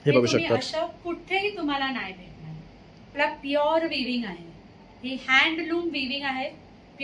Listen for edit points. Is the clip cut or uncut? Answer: cut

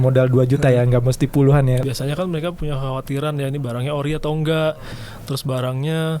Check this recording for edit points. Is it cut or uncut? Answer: cut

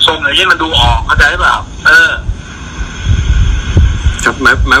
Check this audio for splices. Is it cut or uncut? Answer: uncut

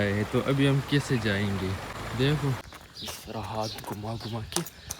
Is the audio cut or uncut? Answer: cut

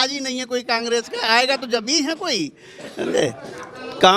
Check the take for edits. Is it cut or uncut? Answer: uncut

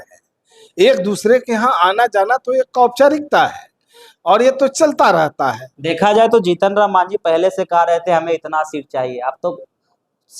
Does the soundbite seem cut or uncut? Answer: cut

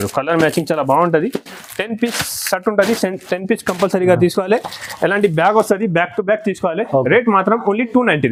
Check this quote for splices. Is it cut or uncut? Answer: uncut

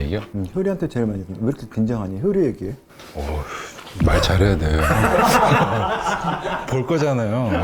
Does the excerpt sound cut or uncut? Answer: uncut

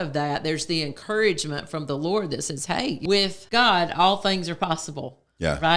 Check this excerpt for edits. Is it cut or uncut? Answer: cut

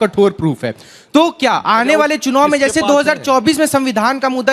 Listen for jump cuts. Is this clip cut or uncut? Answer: uncut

